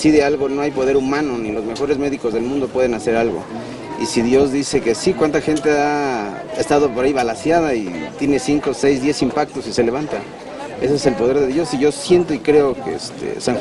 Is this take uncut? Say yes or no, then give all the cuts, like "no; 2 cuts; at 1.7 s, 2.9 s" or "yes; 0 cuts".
yes; 0 cuts